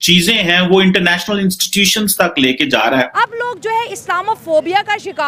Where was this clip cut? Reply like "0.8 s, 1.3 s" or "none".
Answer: 3.1 s

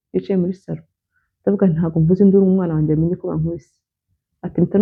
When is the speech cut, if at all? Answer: none

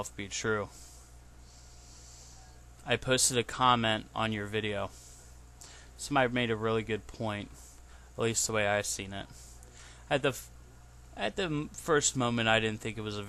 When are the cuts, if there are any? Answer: 8.0 s

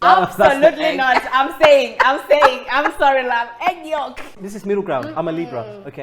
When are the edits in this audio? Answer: 4.4 s

